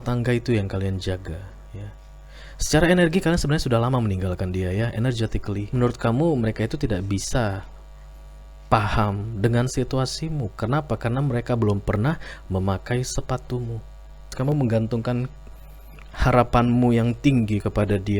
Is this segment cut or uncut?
cut